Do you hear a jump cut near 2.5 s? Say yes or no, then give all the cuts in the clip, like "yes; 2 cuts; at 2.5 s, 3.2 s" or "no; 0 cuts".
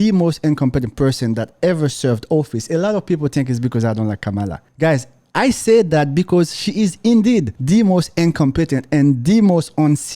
no; 2 cuts; at 4.6 s, 7.5 s